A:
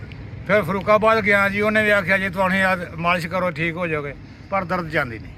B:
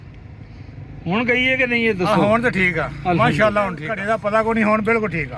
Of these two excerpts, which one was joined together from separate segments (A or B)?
B